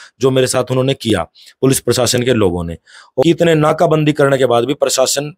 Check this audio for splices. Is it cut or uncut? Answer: cut